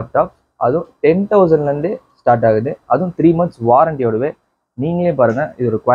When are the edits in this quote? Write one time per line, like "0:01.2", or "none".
none